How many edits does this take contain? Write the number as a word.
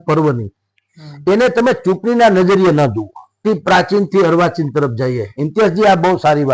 one